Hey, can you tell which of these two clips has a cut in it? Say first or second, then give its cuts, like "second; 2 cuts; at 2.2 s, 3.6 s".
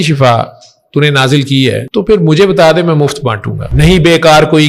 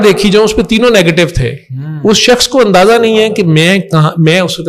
first; 2 cuts; at 1.8 s, 3.7 s